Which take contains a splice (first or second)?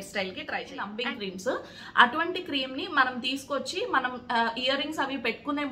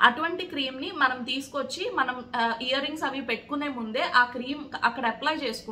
first